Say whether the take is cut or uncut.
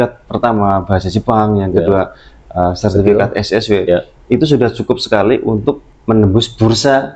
cut